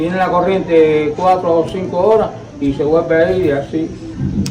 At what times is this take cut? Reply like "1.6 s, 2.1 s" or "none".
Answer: none